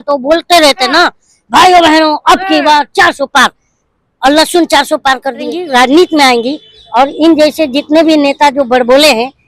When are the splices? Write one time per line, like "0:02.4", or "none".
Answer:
0:05.6